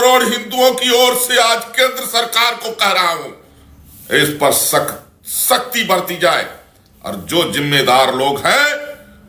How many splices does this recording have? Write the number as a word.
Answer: zero